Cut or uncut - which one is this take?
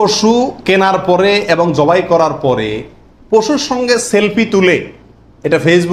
uncut